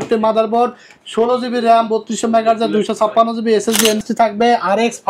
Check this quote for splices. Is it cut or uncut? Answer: cut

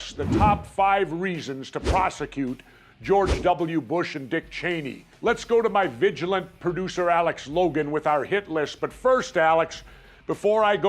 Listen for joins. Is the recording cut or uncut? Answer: cut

